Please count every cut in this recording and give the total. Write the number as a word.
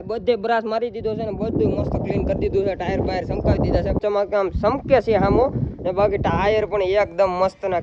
one